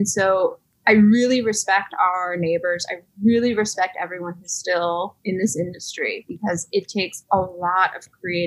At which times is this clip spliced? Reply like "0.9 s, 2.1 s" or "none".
5.2 s